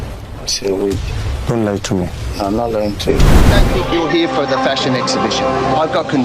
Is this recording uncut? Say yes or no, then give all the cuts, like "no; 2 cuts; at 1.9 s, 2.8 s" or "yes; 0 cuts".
no; 1 cut; at 3.5 s